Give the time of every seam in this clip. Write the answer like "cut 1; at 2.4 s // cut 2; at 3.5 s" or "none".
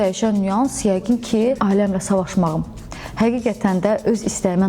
cut 1; at 1.6 s

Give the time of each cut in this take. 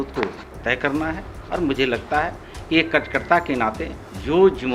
none

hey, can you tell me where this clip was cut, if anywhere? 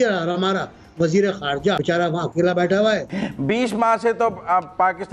cut 1; at 1.8 s // cut 2; at 3.2 s

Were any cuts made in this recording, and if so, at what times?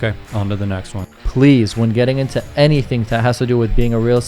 cut 1; at 0.9 s

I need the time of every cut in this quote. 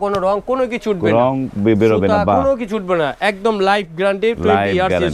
none

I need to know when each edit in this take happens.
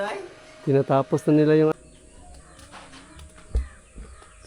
cut 1; at 1.7 s

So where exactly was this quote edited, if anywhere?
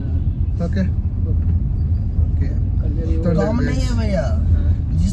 none

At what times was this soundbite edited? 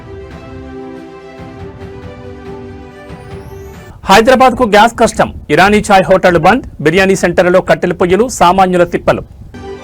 none

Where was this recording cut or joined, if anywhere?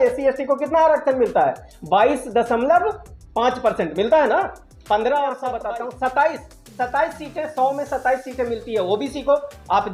cut 1; at 5.5 s

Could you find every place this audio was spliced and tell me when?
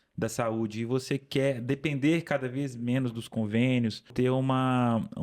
cut 1; at 4.1 s

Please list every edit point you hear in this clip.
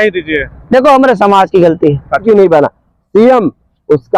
cut 1; at 2.2 s

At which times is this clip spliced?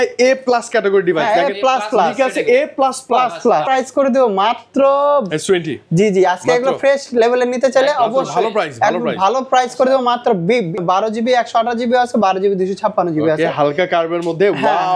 cut 1; at 3.6 s // cut 2; at 10.8 s

